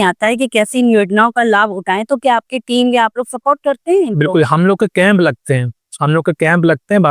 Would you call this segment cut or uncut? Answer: uncut